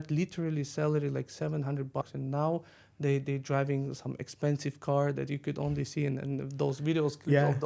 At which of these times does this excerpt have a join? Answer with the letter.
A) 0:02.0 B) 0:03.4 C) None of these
A